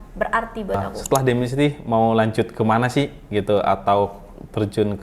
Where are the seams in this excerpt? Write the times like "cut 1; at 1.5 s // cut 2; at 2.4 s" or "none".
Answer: cut 1; at 0.9 s